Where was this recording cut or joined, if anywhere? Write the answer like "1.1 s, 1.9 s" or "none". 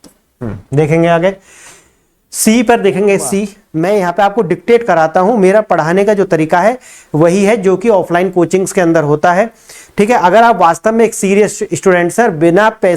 3.6 s

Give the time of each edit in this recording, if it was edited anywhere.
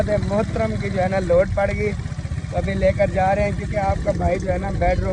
none

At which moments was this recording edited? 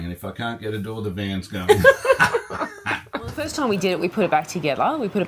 none

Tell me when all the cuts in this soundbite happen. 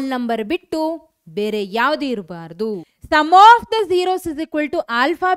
2.9 s

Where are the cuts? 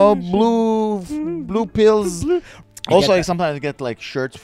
2.5 s

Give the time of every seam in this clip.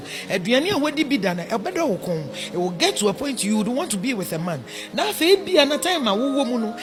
none

